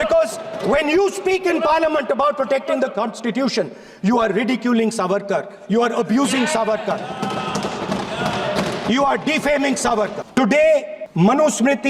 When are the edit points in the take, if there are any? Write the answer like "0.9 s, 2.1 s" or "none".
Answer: 10.2 s, 11.0 s